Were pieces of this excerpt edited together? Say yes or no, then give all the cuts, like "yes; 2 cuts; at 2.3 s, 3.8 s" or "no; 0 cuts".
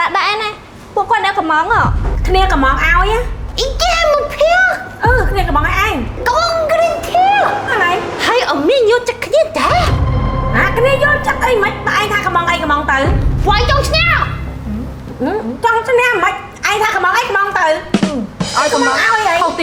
no; 0 cuts